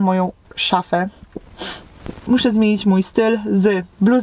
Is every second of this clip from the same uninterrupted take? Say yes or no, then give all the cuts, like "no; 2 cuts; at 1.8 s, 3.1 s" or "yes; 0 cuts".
yes; 0 cuts